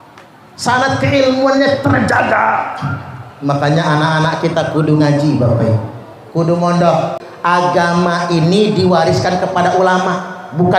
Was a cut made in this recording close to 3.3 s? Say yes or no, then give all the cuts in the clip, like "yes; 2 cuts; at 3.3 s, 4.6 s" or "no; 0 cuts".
no; 1 cut; at 7.2 s